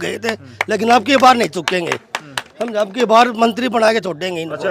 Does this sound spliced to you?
no; 0 cuts

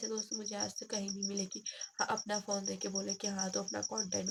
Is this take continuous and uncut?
yes; 0 cuts

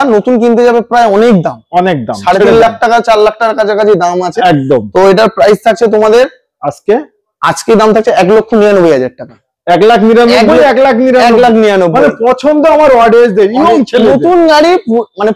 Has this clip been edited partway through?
no; 0 cuts

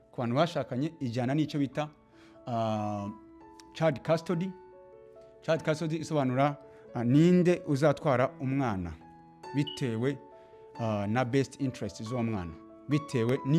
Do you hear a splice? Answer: no; 0 cuts

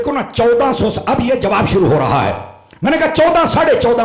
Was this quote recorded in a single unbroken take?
yes; 0 cuts

